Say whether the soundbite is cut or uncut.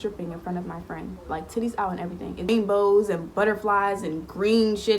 cut